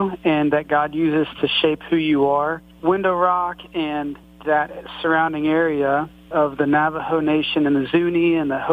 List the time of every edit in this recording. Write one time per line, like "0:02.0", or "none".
0:02.7
0:04.2
0:06.3